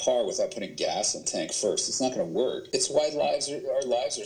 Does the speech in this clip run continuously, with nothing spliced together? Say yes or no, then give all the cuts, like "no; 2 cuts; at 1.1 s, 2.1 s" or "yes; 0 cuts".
no; 2 cuts; at 1.2 s, 2.6 s